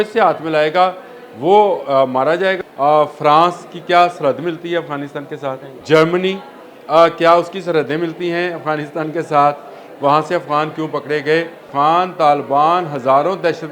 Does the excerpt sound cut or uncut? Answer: cut